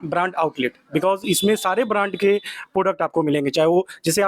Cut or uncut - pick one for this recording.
uncut